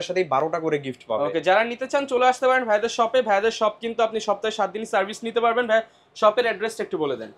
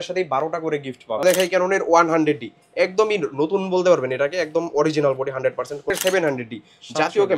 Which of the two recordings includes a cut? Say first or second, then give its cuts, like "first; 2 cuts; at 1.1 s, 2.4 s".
second; 2 cuts; at 1.2 s, 5.9 s